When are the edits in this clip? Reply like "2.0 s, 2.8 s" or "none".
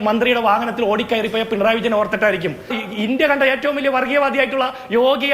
2.8 s